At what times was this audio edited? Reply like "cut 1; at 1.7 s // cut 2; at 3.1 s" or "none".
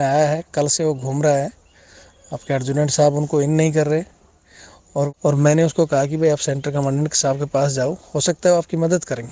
cut 1; at 5.1 s